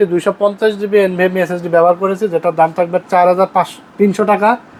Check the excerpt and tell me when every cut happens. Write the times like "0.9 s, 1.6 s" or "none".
none